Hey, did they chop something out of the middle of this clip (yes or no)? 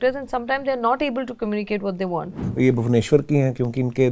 yes